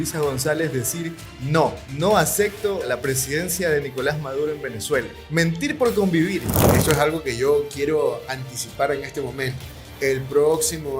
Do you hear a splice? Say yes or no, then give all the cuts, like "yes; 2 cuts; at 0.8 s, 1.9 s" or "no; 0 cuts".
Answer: yes; 4 cuts; at 1.8 s, 2.9 s, 5.2 s, 6.7 s